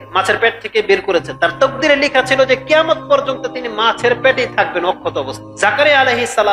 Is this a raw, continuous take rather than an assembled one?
no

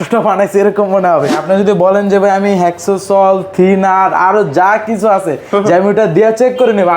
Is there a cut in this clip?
yes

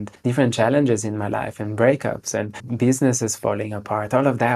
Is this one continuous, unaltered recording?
no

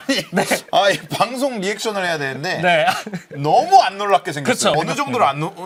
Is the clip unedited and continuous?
yes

